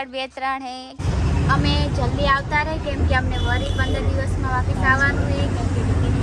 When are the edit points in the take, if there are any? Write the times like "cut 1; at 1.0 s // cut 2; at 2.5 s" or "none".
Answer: cut 1; at 1.0 s